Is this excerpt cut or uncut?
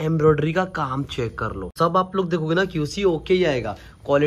cut